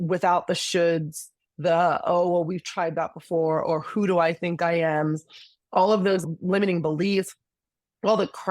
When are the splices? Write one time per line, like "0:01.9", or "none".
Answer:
0:06.2